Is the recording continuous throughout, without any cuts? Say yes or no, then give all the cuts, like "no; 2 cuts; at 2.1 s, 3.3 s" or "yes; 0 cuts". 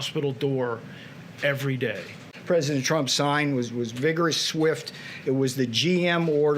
no; 1 cut; at 2.3 s